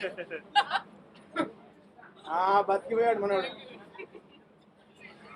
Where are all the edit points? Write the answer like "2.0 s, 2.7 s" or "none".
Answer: none

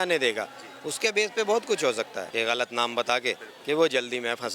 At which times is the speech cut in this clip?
2.2 s

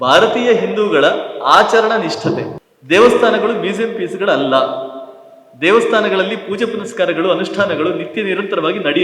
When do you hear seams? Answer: 2.5 s

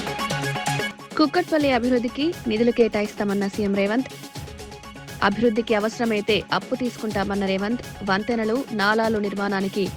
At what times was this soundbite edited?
1.0 s

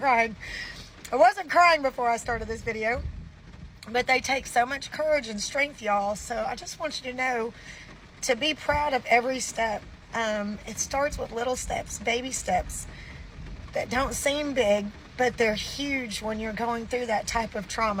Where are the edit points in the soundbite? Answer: none

